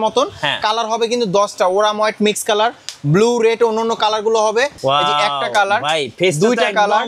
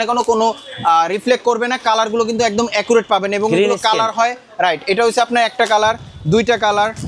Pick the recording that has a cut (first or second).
first